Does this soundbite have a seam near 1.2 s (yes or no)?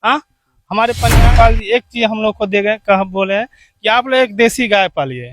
yes